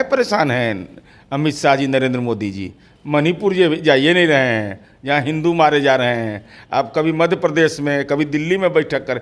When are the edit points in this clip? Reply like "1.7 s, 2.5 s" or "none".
none